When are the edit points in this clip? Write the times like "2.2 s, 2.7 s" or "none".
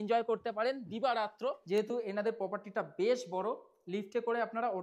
1.6 s